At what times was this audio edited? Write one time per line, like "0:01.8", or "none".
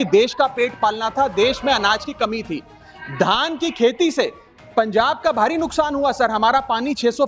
none